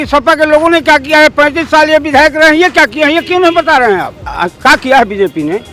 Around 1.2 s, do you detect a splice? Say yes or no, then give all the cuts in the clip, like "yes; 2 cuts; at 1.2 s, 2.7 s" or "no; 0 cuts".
no; 1 cut; at 4.3 s